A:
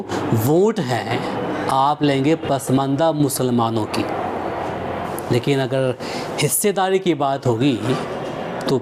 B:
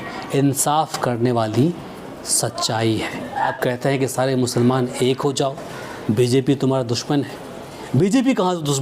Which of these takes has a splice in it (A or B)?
B